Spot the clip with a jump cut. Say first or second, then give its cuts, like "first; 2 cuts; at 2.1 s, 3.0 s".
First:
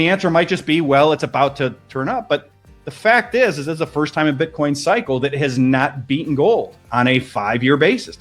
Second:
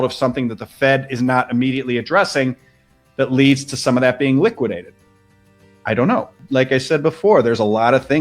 second; 1 cut; at 6.4 s